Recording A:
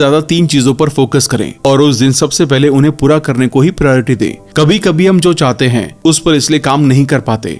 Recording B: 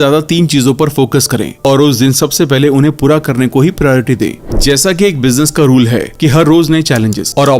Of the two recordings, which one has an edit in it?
B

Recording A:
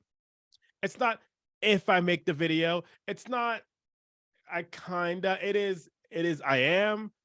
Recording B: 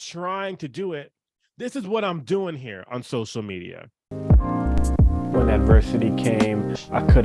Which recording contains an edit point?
B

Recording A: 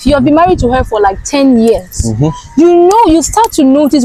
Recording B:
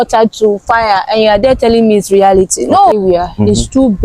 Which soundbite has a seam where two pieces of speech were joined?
B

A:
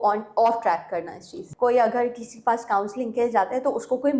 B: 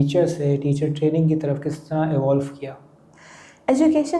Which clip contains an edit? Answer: A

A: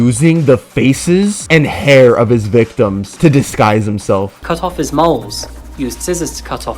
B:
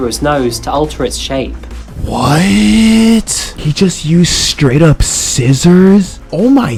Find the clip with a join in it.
A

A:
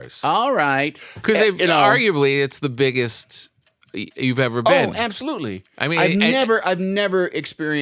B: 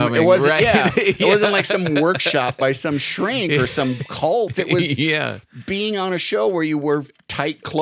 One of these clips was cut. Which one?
A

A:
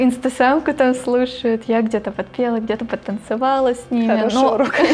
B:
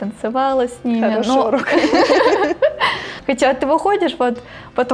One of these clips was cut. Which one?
B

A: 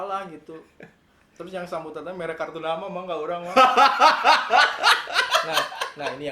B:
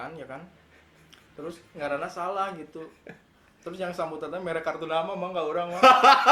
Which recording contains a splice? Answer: A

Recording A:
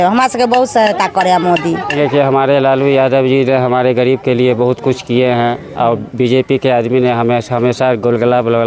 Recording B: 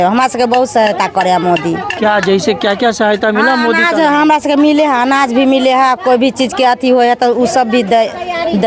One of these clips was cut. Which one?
A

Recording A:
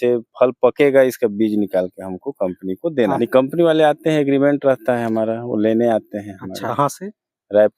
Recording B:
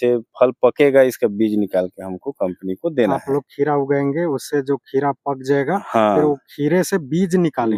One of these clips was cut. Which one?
A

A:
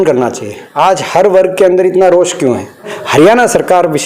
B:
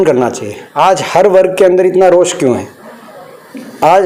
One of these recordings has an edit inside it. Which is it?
A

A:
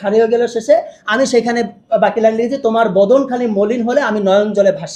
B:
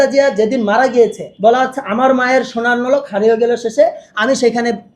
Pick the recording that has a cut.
B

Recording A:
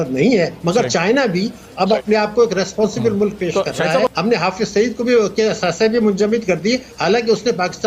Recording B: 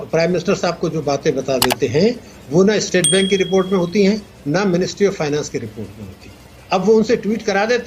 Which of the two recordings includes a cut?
A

